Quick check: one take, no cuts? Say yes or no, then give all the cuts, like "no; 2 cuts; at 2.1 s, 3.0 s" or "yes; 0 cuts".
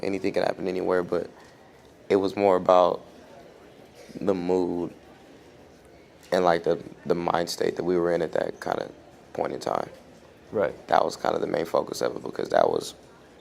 yes; 0 cuts